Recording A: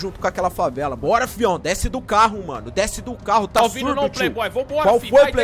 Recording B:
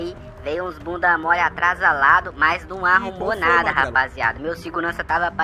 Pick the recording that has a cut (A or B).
A